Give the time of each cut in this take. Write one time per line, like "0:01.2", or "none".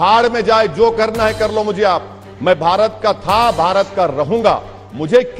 none